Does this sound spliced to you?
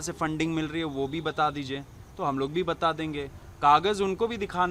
no; 0 cuts

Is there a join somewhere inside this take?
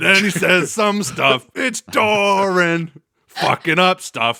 no; 0 cuts

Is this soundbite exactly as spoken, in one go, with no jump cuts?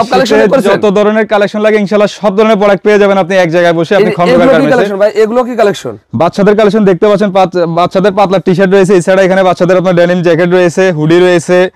yes; 0 cuts

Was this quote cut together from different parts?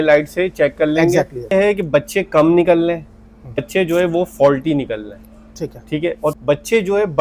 yes; 3 cuts; at 1.5 s, 3.6 s, 6.4 s

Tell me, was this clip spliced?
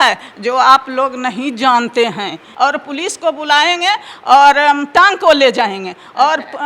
yes; 1 cut; at 2.5 s

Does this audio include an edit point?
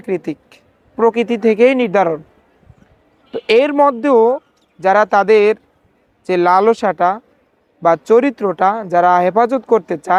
no; 0 cuts

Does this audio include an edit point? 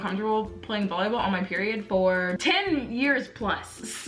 yes; 1 cut; at 2.4 s

